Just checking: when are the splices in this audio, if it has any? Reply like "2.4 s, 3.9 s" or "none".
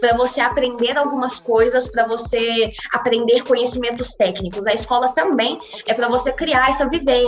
none